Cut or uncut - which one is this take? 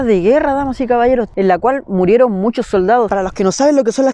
cut